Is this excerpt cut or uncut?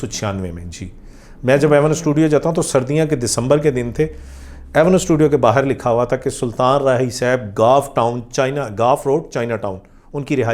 uncut